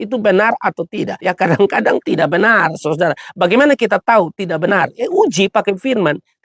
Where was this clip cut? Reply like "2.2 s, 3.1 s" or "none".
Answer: 1.1 s